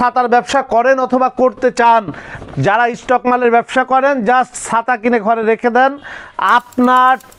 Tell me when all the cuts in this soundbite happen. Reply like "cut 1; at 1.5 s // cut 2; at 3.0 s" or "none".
none